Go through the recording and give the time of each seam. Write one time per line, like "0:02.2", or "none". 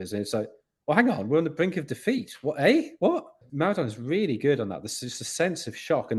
0:03.4